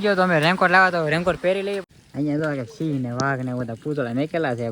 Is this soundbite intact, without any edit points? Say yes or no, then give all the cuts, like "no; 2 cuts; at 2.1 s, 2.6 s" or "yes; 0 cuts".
no; 1 cut; at 1.8 s